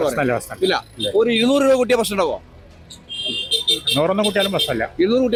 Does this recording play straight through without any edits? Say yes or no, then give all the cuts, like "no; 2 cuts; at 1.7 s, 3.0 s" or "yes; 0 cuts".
yes; 0 cuts